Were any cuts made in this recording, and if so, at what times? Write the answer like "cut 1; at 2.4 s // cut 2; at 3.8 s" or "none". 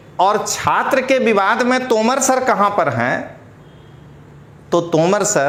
none